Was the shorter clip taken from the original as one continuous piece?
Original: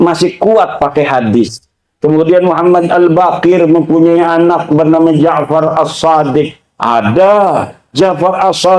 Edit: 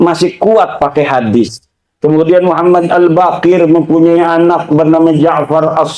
yes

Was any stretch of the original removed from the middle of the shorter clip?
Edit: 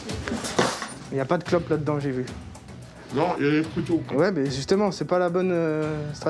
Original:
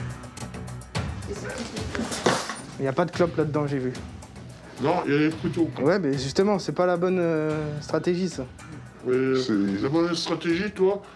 no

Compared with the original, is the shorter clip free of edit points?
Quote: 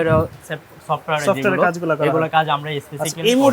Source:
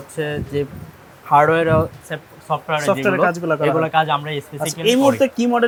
yes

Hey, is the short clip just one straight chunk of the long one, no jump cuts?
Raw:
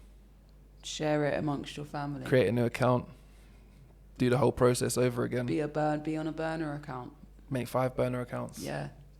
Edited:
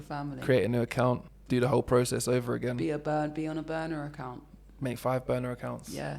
no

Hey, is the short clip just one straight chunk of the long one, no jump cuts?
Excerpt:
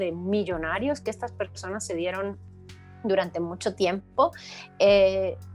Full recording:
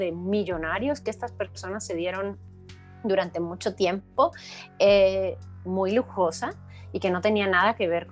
yes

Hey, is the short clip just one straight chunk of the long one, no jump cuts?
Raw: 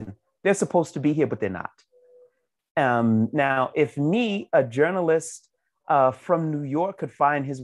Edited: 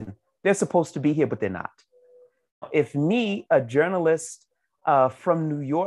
no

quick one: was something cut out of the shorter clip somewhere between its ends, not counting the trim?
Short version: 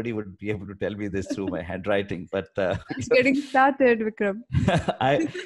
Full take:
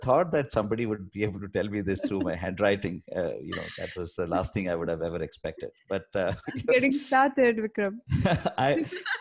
yes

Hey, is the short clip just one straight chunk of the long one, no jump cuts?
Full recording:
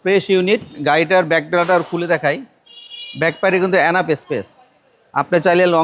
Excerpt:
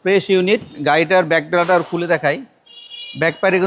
yes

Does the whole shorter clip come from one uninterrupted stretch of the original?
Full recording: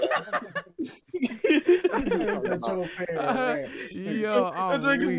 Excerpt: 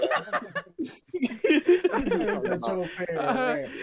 yes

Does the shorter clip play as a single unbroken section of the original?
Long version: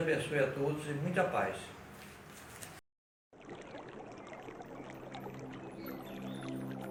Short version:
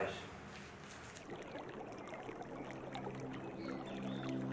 no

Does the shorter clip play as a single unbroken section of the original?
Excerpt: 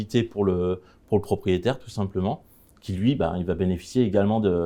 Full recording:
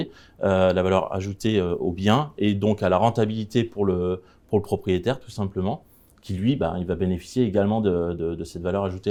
yes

